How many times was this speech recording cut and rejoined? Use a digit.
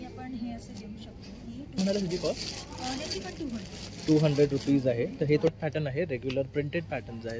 2